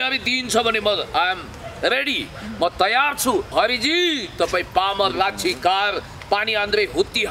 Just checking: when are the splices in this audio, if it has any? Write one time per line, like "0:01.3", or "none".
0:03.5